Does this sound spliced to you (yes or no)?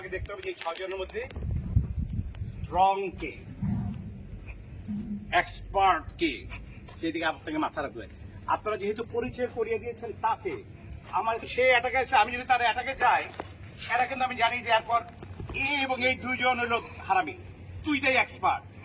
yes